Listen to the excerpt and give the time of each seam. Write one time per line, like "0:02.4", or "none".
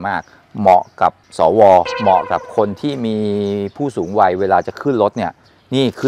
none